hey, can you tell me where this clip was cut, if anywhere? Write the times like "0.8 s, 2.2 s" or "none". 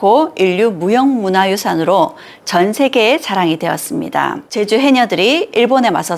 4.4 s